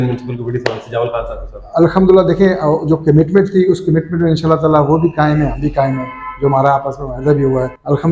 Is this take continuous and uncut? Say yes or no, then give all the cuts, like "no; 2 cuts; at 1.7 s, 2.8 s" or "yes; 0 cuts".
yes; 0 cuts